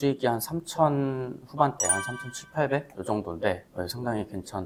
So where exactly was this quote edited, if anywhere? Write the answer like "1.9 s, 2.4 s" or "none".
none